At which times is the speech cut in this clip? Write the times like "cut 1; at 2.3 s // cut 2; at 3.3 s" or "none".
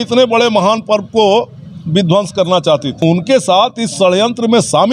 cut 1; at 3.0 s